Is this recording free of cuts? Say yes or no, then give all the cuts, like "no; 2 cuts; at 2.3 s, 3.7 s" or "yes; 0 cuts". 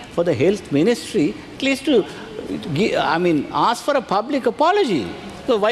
yes; 0 cuts